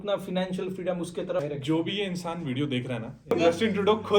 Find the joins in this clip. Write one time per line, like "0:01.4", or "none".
0:01.4
0:03.3